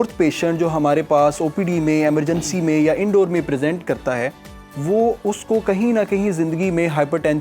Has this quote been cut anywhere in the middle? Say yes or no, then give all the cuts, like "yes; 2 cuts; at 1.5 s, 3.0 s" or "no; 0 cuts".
no; 0 cuts